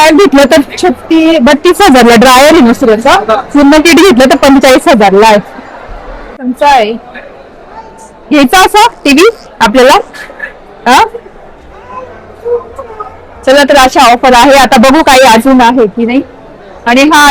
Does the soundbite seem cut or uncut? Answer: cut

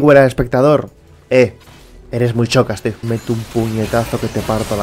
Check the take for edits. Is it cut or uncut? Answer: cut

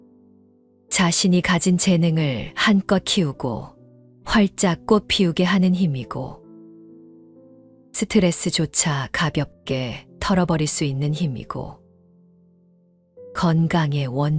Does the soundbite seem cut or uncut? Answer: cut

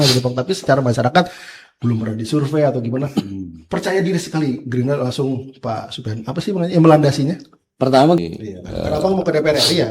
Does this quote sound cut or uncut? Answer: cut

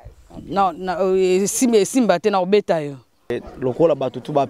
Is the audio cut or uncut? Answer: cut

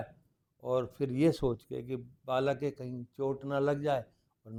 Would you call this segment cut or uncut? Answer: uncut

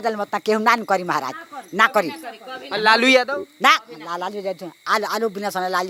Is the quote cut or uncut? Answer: uncut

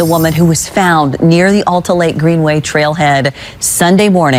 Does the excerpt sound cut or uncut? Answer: uncut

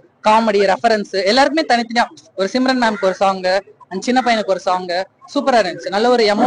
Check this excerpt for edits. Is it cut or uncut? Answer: uncut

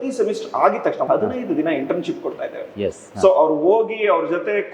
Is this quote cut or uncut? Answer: cut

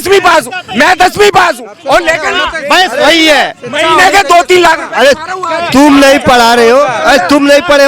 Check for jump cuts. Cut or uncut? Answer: uncut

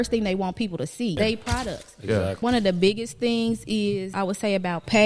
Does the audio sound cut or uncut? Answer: cut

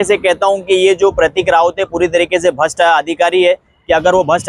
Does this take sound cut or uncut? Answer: uncut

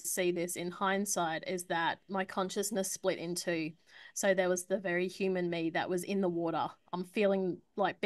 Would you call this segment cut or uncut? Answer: uncut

